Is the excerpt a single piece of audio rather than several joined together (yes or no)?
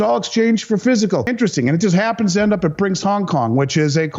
no